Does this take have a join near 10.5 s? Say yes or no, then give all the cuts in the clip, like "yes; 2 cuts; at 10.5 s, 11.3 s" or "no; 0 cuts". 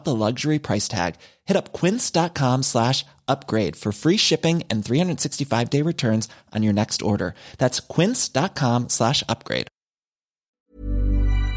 yes; 1 cut; at 10.5 s